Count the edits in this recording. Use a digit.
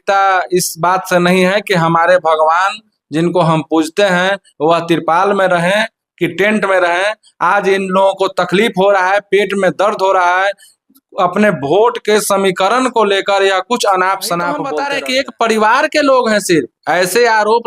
1